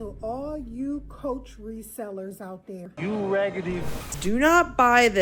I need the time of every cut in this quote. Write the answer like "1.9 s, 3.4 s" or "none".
2.9 s, 4.1 s